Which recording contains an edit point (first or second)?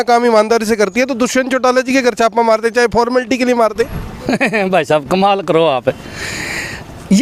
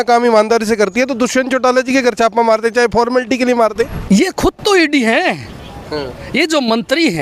second